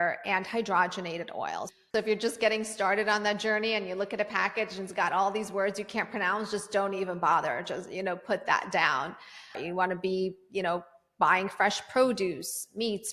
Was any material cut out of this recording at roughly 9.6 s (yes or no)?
yes